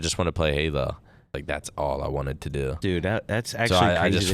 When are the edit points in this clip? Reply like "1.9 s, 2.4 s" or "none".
1.4 s